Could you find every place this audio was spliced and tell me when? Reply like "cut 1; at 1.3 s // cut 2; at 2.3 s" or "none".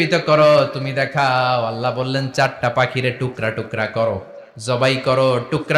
none